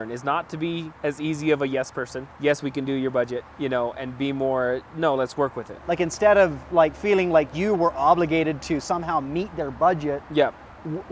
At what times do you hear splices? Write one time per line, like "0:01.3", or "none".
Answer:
0:00.9
0:02.2
0:03.5
0:04.9
0:05.7